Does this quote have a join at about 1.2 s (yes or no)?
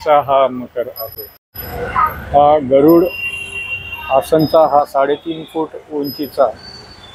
no